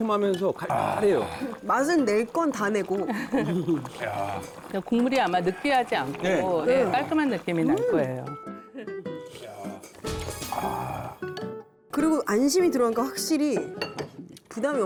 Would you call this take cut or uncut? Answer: uncut